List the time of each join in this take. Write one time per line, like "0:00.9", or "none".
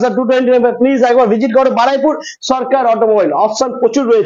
none